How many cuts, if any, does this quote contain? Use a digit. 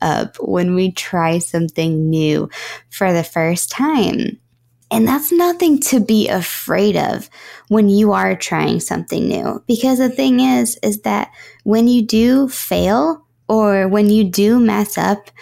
0